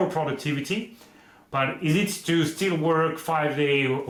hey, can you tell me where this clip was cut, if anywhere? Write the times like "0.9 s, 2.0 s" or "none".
none